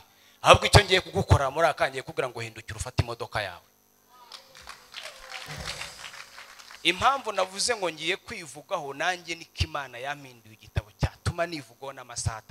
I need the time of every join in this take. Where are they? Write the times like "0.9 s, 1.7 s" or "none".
6.7 s